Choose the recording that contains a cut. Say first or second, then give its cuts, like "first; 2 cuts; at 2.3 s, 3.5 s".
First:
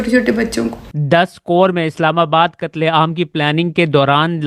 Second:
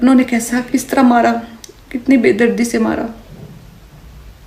first; 1 cut; at 0.9 s